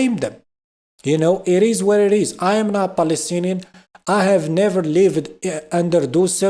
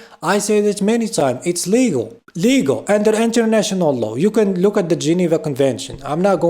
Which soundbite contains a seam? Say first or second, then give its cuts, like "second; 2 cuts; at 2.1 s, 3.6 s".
second; 1 cut; at 2.2 s